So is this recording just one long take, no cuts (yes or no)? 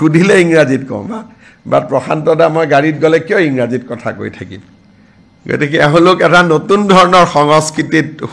yes